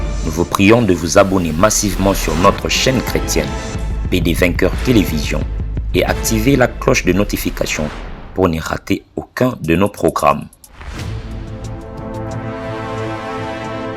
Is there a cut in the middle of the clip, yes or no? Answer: no